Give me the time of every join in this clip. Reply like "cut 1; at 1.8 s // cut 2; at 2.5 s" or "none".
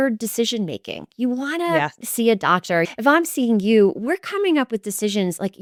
none